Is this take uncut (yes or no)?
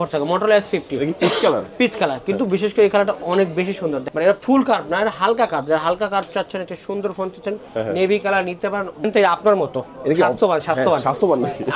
no